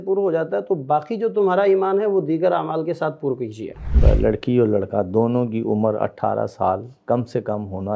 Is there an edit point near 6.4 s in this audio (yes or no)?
no